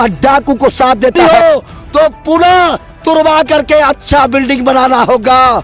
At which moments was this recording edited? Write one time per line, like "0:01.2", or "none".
0:01.2